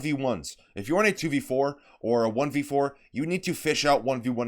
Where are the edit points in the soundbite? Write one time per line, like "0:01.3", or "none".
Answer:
0:01.2